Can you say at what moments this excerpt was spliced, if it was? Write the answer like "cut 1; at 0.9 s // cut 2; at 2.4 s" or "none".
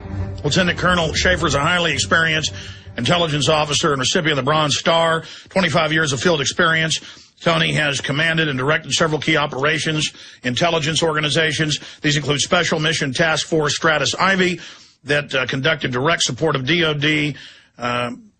cut 1; at 15.8 s

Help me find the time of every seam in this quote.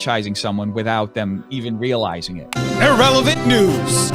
cut 1; at 2.5 s

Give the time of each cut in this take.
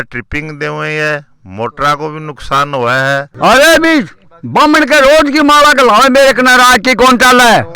cut 1; at 3.4 s

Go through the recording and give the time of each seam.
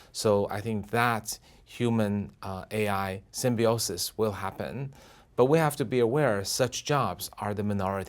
none

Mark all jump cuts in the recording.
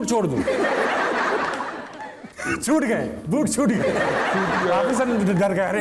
cut 1; at 2.3 s

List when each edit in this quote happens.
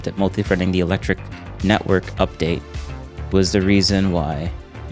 none

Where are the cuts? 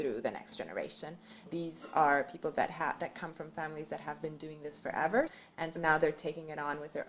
cut 1; at 1.5 s // cut 2; at 5.3 s

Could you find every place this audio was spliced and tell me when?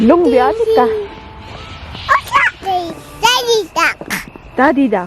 cut 1; at 2.6 s

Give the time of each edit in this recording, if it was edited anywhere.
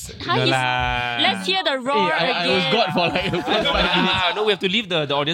cut 1; at 4.4 s

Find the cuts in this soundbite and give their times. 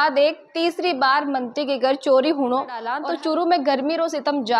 cut 1; at 2.9 s

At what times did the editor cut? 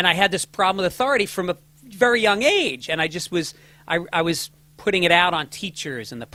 none

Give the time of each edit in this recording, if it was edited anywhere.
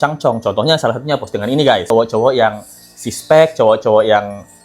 cut 1; at 1.9 s

